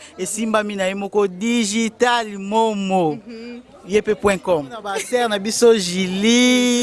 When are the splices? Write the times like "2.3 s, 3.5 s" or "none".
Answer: 5.0 s